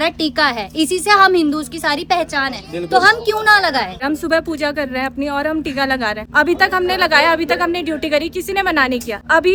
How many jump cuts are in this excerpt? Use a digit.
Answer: 0